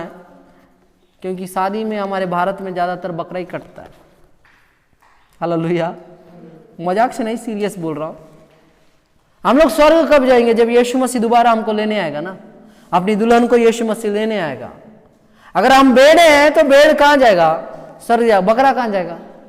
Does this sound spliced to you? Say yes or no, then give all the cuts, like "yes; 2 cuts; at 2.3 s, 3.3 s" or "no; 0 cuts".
no; 0 cuts